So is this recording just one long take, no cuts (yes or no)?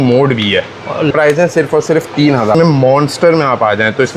no